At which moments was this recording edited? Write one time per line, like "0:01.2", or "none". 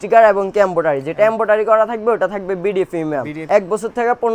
0:03.3